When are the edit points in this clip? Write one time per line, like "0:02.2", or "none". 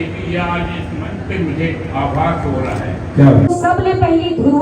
0:03.5